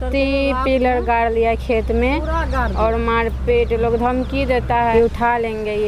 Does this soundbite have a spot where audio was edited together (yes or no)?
yes